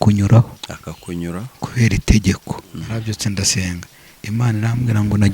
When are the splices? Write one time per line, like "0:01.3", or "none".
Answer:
0:02.4